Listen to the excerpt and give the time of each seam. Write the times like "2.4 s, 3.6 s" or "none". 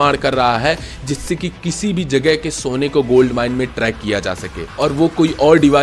none